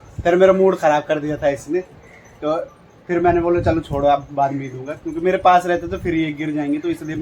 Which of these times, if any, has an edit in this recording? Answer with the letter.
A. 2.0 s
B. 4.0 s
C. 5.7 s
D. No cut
D